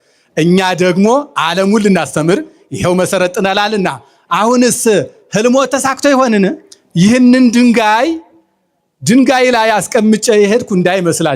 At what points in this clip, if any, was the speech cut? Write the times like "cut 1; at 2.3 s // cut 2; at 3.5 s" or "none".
cut 1; at 6.7 s